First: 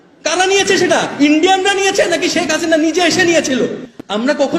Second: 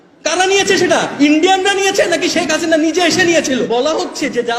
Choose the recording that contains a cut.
second; 1 cut; at 3.7 s

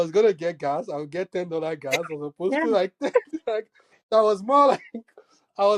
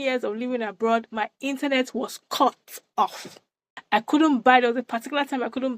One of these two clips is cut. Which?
second; 1 cut; at 3.7 s

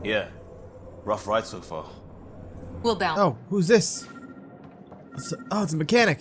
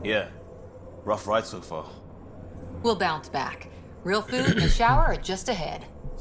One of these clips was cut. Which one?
second; 1 cut; at 3.1 s

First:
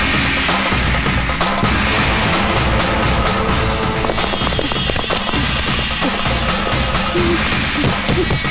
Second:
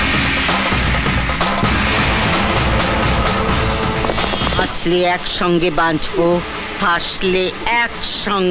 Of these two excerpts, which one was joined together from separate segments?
second; 1 cut; at 4.6 s

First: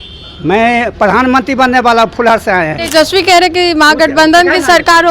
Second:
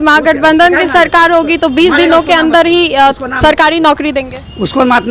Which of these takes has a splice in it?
first; 1 cut; at 2.8 s

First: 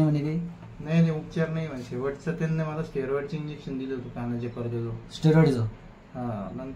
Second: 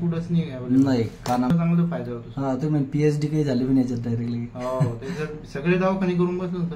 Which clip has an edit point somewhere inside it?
second; 1 cut; at 1.5 s

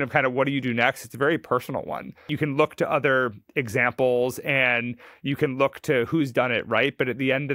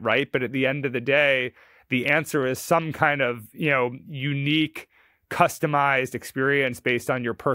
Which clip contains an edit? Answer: first; 1 cut; at 2.3 s

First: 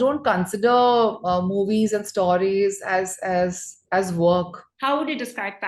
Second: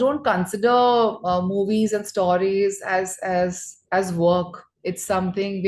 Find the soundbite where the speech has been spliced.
first; 1 cut; at 4.6 s

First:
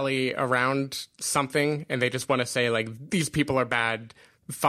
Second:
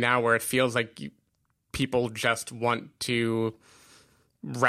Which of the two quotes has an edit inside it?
first; 1 cut; at 2.9 s

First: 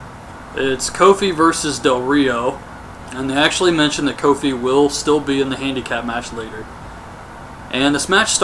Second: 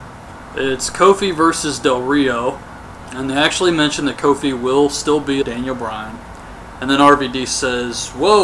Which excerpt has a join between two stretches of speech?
first; 1 cut; at 5.4 s

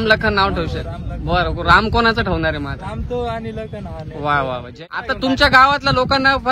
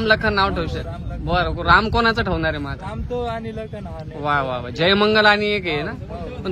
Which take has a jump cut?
first; 1 cut; at 4.7 s

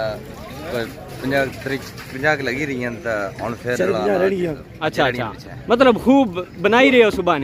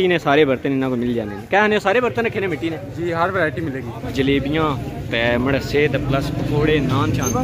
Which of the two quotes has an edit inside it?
second; 1 cut; at 4.1 s

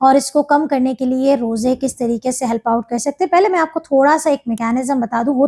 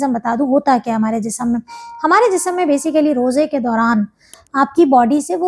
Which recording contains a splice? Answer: second; 1 cut; at 4.3 s

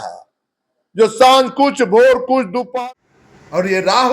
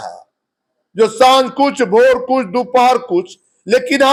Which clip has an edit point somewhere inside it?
first; 1 cut; at 2.7 s

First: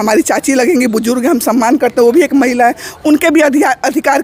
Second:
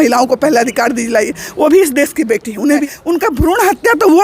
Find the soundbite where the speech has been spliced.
second; 1 cut; at 2.8 s

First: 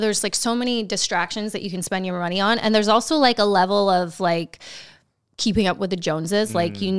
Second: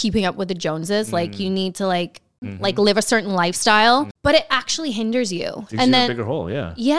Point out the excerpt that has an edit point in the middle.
second; 2 cuts; at 2.5 s, 4.1 s

